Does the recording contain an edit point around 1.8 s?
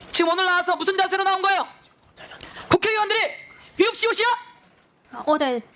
no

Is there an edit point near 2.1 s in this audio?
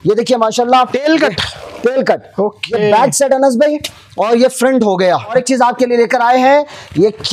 no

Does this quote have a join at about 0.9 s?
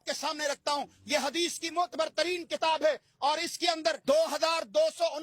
no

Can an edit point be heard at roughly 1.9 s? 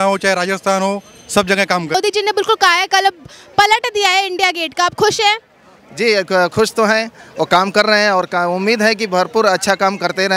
yes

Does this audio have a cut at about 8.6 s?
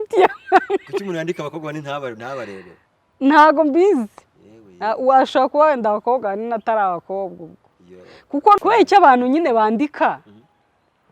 yes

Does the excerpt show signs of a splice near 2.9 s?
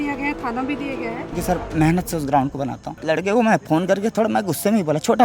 yes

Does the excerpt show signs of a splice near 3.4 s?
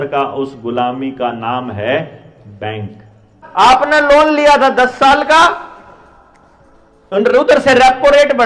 yes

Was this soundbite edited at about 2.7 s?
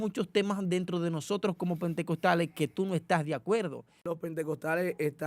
no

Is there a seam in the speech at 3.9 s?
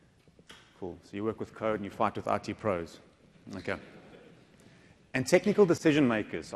yes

